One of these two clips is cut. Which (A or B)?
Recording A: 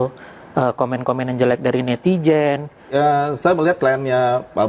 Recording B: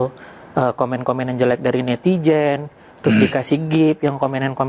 A